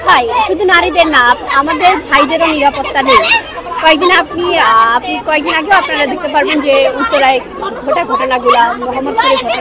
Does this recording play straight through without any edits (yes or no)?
yes